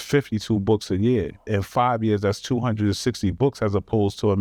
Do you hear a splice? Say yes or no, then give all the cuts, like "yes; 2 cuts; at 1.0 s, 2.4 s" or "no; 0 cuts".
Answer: no; 0 cuts